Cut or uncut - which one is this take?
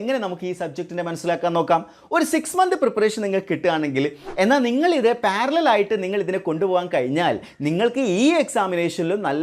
cut